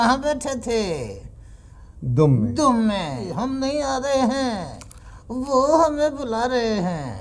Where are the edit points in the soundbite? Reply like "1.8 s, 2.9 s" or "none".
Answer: 3.3 s